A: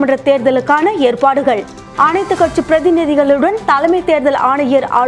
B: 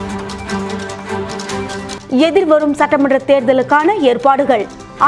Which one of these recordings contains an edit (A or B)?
B